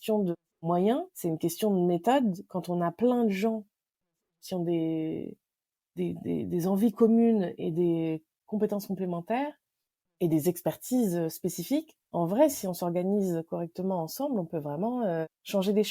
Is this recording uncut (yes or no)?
yes